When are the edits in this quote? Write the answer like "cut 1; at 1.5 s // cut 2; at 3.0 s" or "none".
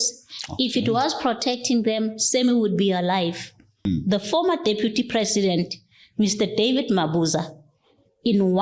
cut 1; at 3.8 s